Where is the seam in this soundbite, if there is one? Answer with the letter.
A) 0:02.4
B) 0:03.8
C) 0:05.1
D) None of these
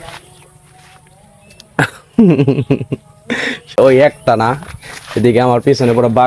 B